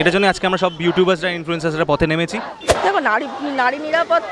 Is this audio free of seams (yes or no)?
no